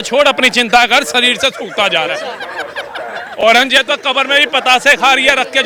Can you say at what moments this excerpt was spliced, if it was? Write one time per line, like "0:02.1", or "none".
none